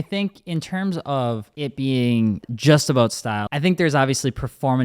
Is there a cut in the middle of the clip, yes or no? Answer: yes